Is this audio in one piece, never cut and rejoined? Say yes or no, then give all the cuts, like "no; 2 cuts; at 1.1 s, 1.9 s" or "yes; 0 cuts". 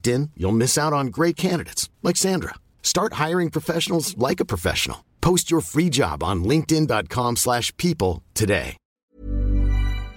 no; 1 cut; at 8.8 s